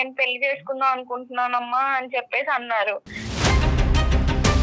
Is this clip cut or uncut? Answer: cut